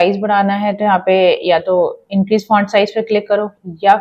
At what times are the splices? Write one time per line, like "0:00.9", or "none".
none